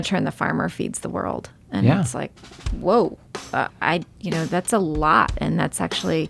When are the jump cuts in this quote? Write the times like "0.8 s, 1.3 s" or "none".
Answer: 3.7 s